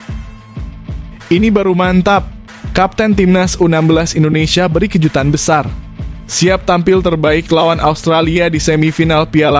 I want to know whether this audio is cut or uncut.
cut